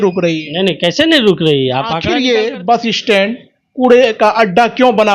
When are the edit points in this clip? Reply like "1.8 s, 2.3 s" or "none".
2.0 s